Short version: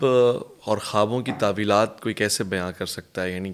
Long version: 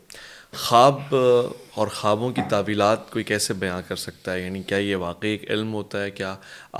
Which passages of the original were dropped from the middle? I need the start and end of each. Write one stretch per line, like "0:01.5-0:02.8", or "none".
none